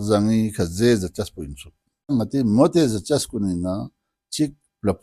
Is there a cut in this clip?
yes; 1 cut; at 2.1 s

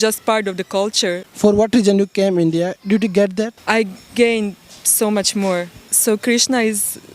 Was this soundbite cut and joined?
yes; 3 cuts; at 1.2 s, 3.6 s, 5.8 s

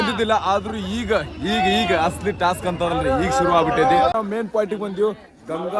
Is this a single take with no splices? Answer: no; 1 cut; at 4.1 s

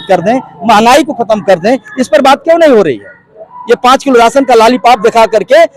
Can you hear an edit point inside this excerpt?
no; 0 cuts

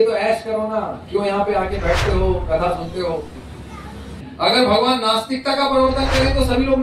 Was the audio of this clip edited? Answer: yes; 1 cut; at 4.3 s

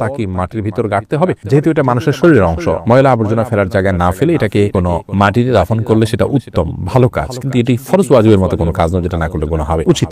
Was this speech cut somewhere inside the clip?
no; 0 cuts

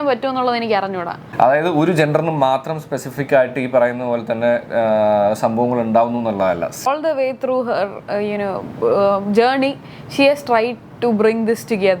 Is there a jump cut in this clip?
yes; 2 cuts; at 1.2 s, 6.9 s

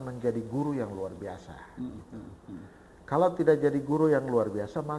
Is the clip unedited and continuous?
yes; 0 cuts

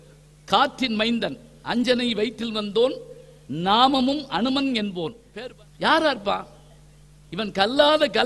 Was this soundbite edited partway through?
yes; 1 cut; at 5.2 s

